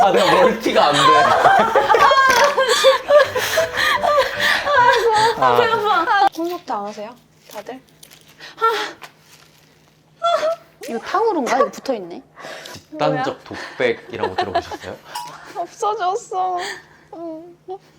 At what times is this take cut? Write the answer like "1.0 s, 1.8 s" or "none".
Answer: 6.3 s, 10.7 s